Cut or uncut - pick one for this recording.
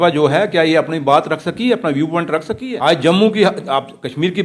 cut